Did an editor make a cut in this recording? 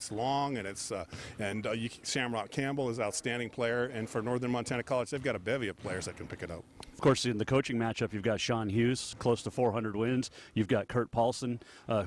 no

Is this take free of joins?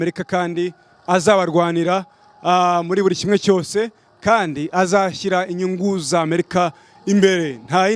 yes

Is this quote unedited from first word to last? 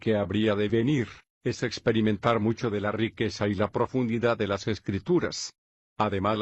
yes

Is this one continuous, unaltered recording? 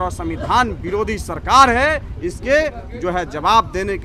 yes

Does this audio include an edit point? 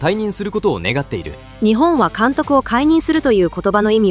yes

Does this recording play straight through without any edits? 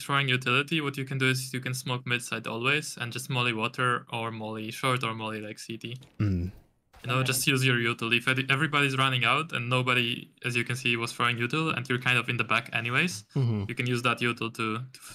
yes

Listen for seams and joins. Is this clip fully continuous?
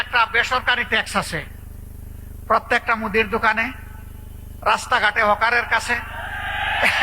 yes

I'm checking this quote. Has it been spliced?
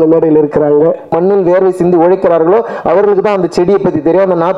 yes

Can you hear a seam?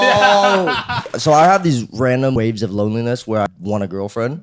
yes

